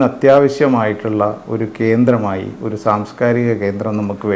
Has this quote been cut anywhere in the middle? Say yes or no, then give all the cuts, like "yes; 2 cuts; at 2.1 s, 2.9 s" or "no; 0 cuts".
no; 0 cuts